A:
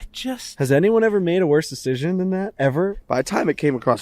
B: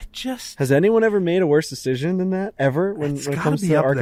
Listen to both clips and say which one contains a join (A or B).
A